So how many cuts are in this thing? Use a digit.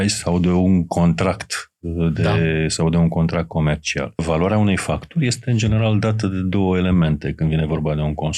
1